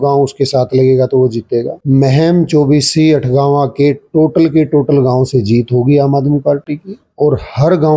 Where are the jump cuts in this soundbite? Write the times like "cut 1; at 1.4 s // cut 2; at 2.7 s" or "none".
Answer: none